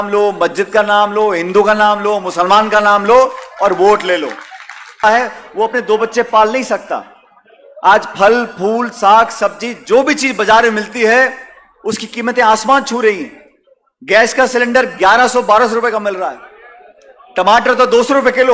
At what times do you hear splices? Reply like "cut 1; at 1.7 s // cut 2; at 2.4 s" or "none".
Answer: cut 1; at 5.0 s